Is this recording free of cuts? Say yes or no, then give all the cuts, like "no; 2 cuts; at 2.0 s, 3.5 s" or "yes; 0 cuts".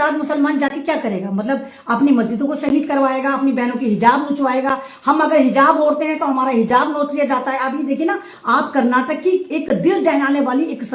yes; 0 cuts